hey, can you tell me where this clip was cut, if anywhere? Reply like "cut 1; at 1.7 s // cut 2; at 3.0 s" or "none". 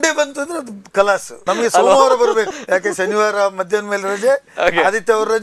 cut 1; at 1.3 s // cut 2; at 2.6 s